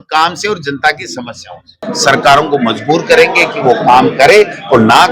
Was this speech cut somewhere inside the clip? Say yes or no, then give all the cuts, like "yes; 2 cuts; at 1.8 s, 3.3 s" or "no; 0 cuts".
yes; 1 cut; at 1.8 s